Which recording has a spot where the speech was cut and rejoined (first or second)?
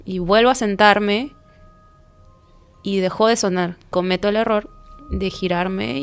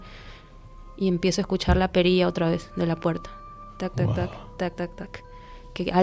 first